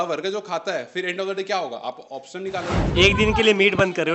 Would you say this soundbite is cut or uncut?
cut